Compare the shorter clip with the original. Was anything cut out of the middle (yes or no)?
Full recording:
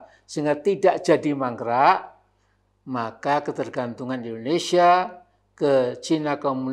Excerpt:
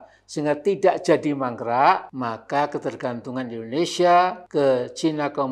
yes